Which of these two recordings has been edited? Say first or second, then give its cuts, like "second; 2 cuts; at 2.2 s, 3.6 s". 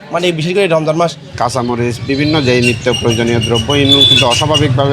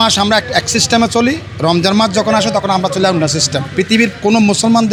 first; 1 cut; at 1.3 s